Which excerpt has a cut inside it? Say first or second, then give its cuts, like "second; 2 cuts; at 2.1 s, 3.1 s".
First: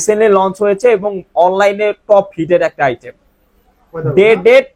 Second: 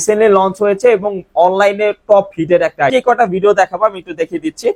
second; 1 cut; at 2.9 s